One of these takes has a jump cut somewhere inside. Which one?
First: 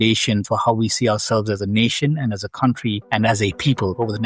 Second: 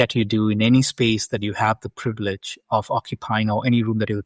first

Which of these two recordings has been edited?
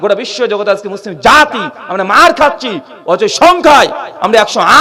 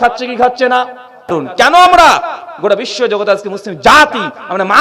second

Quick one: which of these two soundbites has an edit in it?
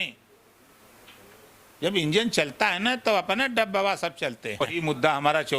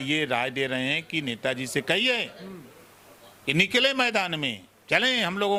first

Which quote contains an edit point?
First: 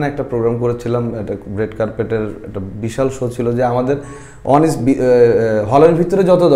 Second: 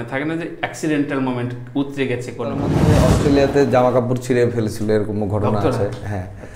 second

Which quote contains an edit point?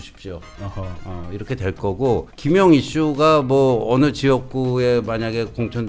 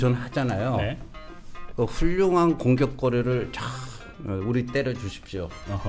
first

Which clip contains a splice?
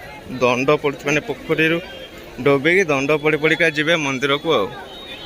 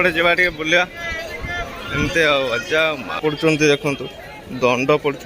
second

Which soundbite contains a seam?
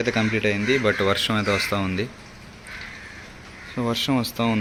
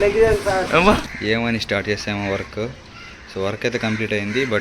second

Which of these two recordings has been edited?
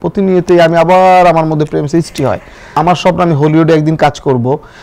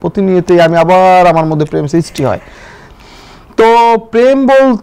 first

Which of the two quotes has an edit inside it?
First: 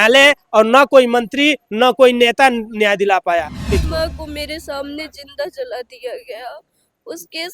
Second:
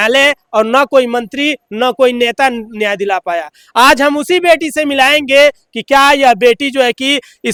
first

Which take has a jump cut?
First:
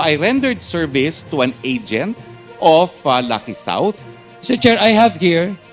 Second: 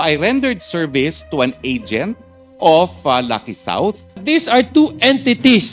second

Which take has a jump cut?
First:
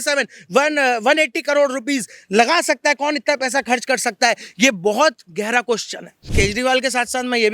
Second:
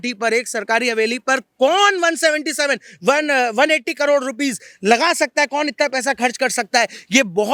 first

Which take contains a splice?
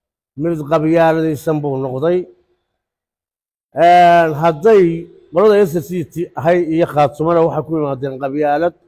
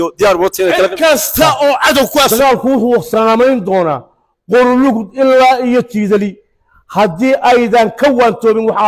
second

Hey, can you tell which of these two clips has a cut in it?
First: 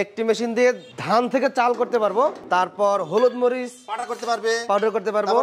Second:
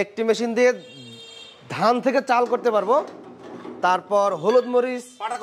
first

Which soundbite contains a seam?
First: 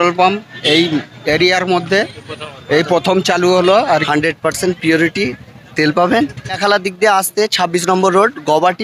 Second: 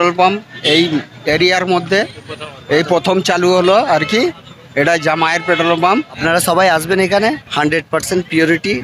first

